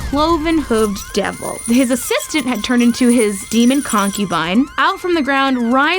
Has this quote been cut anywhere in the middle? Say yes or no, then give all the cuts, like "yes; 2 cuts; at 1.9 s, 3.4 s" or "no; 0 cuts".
yes; 2 cuts; at 3.4 s, 4.7 s